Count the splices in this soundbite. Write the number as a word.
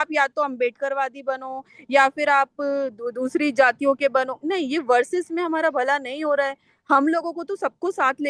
zero